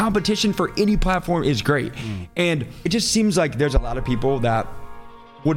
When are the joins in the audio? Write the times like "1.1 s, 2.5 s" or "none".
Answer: 2.7 s